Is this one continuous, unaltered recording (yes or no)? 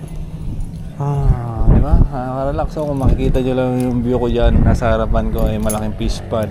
yes